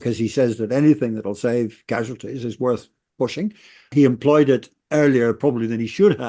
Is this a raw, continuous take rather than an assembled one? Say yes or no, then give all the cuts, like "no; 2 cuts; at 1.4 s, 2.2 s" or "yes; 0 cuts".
no; 1 cut; at 3.9 s